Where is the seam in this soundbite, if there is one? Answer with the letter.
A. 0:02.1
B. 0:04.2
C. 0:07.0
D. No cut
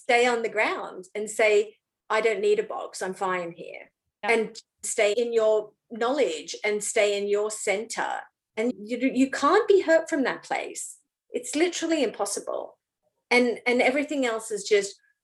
B